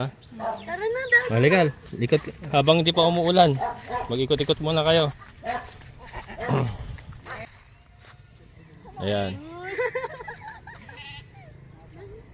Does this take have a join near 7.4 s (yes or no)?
yes